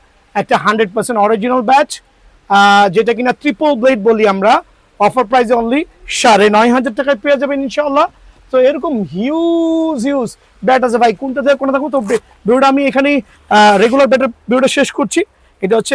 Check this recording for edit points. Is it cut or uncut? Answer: uncut